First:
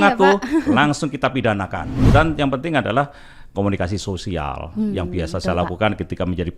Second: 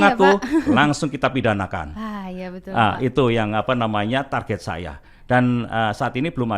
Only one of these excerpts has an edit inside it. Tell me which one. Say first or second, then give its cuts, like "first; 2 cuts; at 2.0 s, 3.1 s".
first; 1 cut; at 1.9 s